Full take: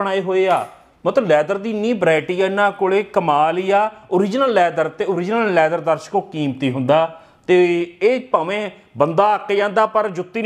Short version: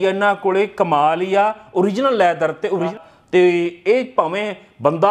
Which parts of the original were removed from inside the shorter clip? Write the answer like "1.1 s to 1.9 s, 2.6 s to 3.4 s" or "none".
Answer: 5.3 s to 7.1 s